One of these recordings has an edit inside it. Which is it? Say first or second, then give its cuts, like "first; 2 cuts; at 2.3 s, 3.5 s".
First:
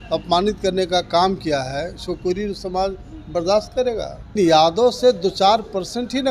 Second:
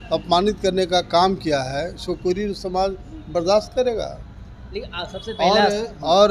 first; 1 cut; at 4.3 s